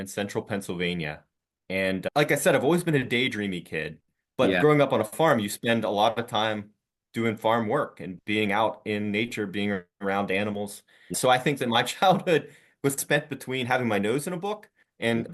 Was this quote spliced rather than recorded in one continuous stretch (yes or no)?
no